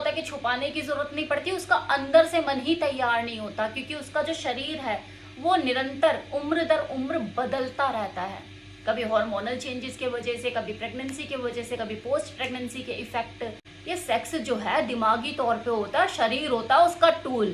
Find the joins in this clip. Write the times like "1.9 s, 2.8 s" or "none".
13.7 s